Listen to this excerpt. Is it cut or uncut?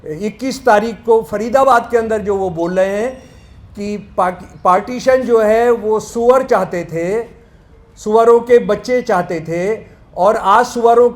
uncut